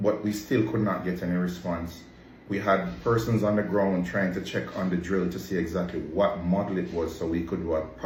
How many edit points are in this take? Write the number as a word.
zero